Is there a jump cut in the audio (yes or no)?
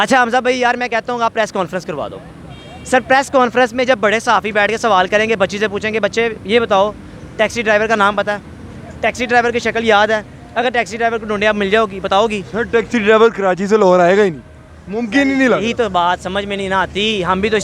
no